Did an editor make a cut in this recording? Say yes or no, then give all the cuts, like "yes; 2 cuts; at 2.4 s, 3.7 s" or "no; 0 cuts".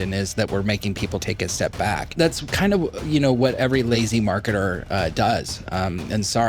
yes; 3 cuts; at 1.2 s, 2.2 s, 3.7 s